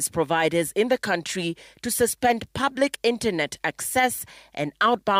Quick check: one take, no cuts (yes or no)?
yes